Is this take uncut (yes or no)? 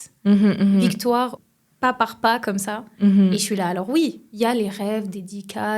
no